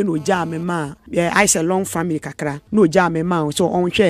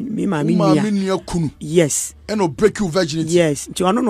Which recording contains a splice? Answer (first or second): first